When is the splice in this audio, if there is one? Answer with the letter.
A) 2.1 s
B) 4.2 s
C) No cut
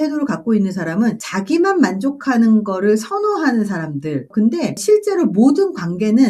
B